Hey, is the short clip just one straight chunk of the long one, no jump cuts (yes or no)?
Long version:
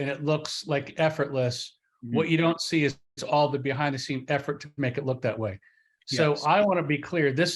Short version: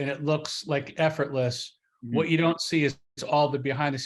yes